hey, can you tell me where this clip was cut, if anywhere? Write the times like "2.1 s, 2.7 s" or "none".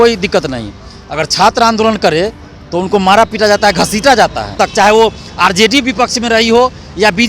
4.5 s